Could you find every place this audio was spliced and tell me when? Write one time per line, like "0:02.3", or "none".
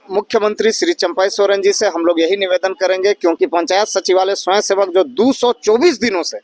0:03.4